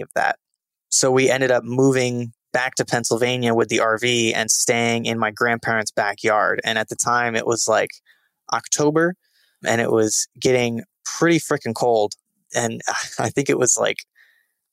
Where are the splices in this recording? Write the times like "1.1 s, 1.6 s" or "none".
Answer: none